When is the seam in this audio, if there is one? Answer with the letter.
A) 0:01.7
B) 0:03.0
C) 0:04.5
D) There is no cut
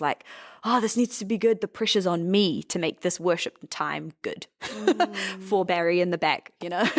D